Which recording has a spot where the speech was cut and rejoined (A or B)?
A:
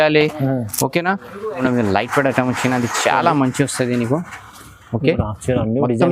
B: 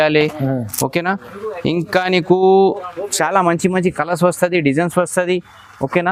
A